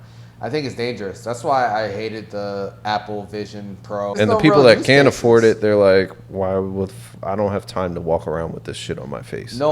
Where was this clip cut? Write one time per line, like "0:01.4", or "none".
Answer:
0:04.1